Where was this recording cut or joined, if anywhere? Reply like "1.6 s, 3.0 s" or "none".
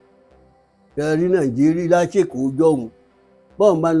none